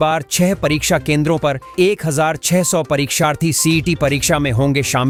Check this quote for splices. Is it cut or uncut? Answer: uncut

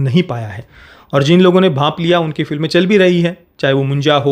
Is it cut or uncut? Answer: uncut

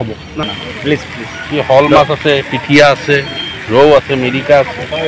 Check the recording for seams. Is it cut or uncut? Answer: uncut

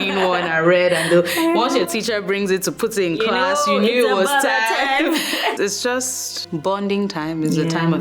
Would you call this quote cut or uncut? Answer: cut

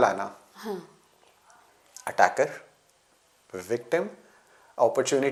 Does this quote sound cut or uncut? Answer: uncut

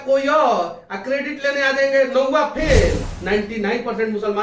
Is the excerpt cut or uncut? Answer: cut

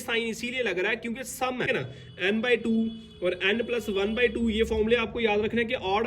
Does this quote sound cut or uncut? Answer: cut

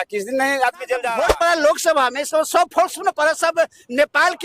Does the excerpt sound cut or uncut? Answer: cut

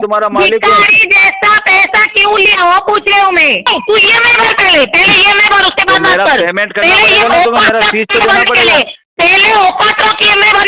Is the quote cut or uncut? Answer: cut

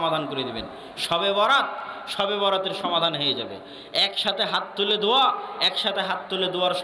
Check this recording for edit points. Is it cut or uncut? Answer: uncut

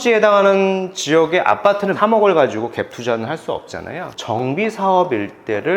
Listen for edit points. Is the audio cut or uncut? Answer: cut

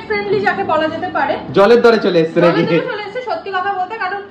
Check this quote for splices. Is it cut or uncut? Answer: uncut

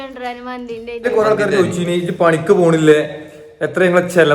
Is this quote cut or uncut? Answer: cut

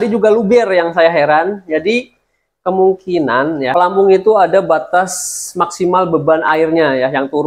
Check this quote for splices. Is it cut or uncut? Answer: cut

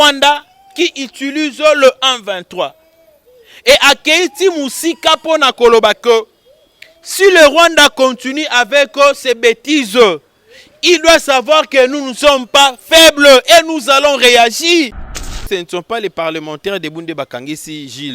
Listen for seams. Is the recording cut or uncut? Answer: cut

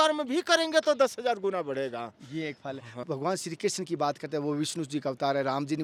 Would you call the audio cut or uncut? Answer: uncut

